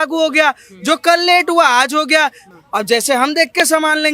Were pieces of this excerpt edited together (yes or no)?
yes